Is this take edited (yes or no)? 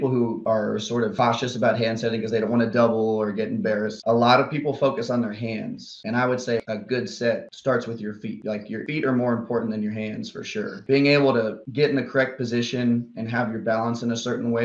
yes